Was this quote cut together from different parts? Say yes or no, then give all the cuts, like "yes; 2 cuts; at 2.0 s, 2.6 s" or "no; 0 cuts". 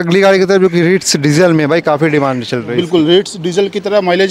no; 0 cuts